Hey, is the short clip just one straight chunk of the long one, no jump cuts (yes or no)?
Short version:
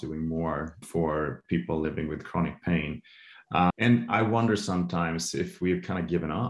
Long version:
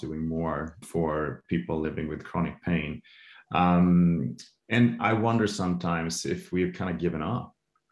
no